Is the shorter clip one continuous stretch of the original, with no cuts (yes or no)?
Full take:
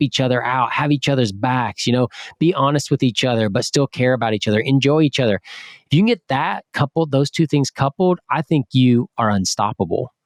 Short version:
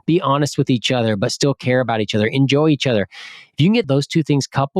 no